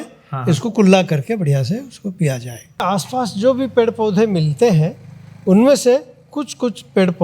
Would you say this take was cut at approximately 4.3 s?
no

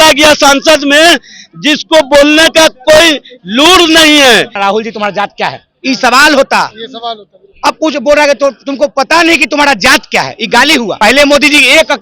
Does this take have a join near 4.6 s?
yes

